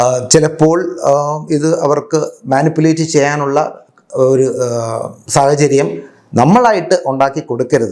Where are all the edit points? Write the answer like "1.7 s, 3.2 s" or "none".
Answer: none